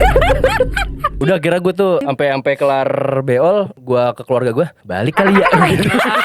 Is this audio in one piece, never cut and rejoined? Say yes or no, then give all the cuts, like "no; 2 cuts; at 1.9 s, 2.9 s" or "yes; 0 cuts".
no; 4 cuts; at 1.1 s, 2.0 s, 3.8 s, 4.8 s